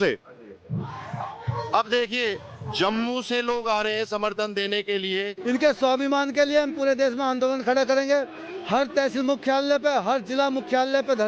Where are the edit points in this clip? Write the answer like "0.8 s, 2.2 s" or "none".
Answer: 5.4 s